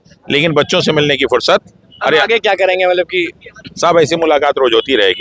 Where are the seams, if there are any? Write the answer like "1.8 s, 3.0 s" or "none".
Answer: none